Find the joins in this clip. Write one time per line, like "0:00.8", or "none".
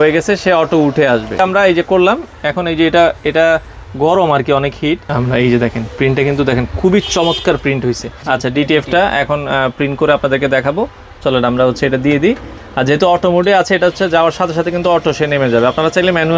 0:01.4
0:05.1
0:08.1